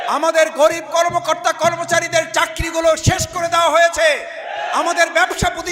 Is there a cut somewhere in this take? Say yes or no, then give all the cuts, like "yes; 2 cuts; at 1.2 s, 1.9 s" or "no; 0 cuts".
no; 0 cuts